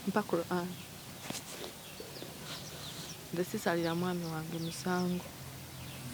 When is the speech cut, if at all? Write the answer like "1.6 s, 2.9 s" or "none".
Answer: 3.3 s